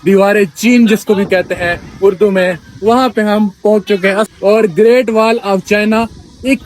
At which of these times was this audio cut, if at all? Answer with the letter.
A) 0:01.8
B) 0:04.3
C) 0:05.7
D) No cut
B